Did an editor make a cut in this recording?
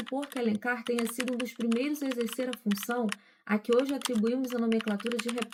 no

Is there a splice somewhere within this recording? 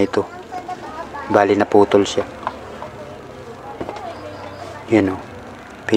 no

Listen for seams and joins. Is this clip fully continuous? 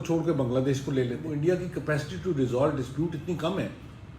no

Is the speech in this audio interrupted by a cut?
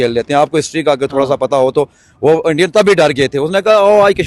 no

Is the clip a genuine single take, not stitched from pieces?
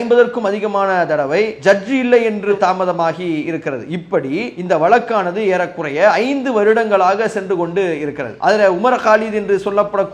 no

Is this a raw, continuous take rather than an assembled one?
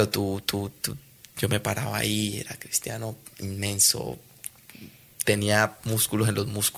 yes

